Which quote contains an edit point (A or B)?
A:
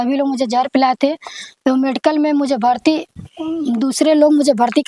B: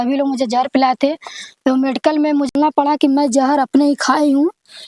B